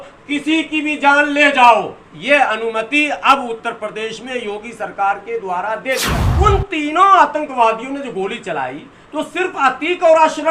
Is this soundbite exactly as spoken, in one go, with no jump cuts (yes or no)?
no